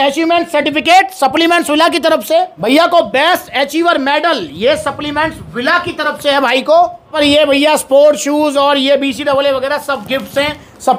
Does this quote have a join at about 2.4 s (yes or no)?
no